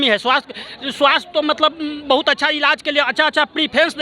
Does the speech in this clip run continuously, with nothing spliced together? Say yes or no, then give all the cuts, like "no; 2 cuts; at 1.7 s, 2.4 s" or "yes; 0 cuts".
yes; 0 cuts